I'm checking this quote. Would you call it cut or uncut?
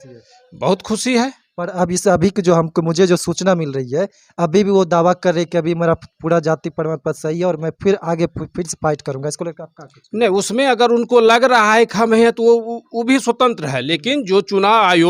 uncut